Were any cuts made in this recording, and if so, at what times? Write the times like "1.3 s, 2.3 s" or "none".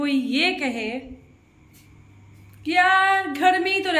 none